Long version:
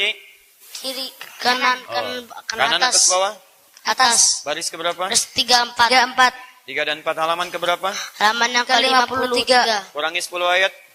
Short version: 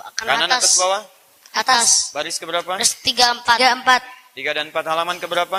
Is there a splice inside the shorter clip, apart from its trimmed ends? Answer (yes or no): no